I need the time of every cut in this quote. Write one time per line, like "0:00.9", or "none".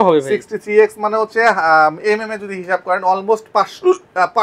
none